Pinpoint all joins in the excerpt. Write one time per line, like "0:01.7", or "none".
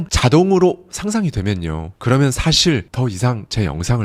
0:03.1

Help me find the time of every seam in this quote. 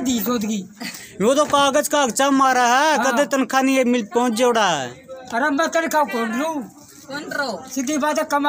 none

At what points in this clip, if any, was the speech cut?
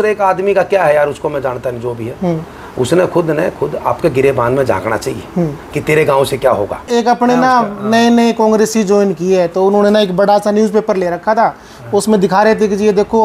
0:06.9

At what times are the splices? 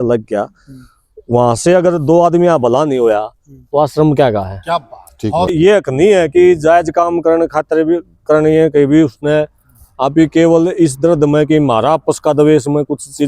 0:05.5

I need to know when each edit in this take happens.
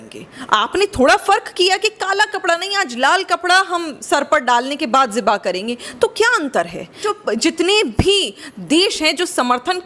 none

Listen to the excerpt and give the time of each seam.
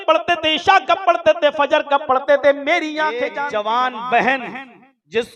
0:03.3

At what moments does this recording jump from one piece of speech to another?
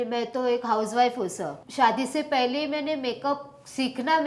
0:01.6

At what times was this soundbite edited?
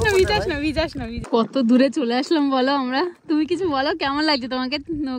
0:01.1

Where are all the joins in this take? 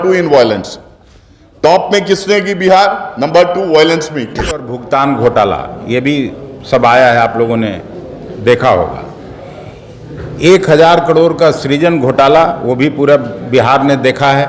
0:04.8

